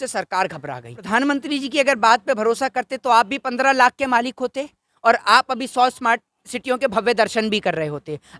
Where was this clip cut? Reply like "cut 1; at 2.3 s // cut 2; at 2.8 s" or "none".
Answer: cut 1; at 0.9 s

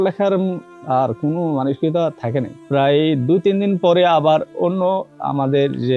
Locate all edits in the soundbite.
cut 1; at 2.6 s

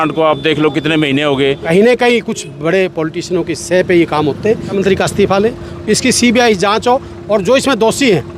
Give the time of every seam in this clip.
cut 1; at 1.6 s // cut 2; at 4.7 s

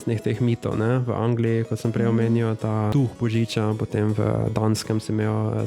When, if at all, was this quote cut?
cut 1; at 2.9 s

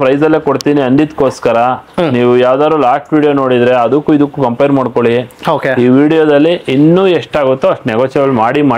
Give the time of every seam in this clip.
none

